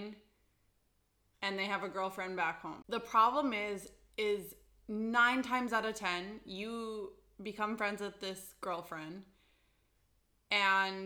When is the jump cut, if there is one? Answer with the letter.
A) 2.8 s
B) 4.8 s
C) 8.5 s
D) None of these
A